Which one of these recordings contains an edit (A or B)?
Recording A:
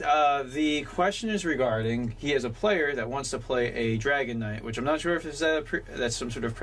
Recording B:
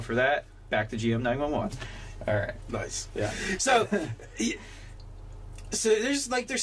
A